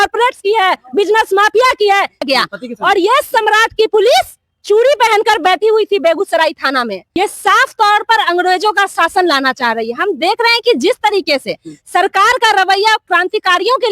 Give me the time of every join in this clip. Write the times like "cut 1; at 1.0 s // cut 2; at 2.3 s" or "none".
cut 1; at 2.2 s // cut 2; at 7.0 s